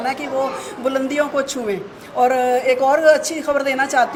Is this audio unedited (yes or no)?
yes